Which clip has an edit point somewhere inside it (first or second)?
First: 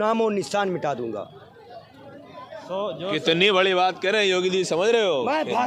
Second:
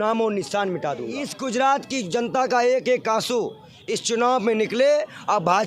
second